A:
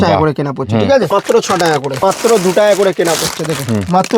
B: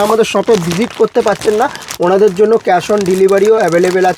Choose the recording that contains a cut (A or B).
A